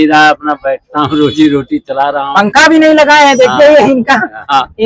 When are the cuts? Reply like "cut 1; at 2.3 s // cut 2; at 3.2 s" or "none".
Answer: none

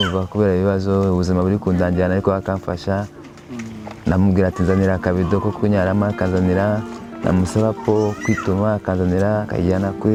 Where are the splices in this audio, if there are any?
none

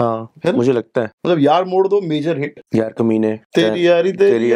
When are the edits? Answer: cut 1; at 1.1 s // cut 2; at 2.6 s // cut 3; at 3.4 s

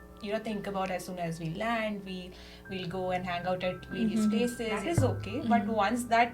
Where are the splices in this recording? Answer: cut 1; at 4.8 s

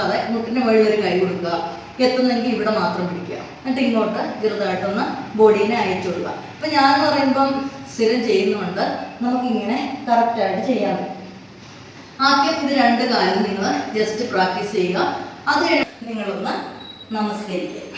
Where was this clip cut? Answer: cut 1; at 15.8 s

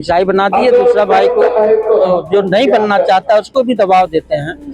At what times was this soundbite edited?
none

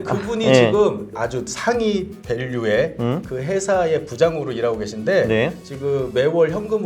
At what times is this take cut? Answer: cut 1; at 1.1 s

